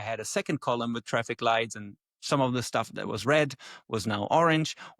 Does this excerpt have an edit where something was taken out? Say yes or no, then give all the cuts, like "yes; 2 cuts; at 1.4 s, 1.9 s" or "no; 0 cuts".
no; 0 cuts